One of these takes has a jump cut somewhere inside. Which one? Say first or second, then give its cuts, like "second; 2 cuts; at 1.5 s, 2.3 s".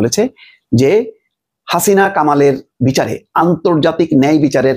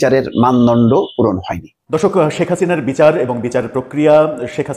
second; 1 cut; at 2.0 s